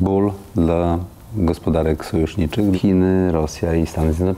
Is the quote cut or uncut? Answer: cut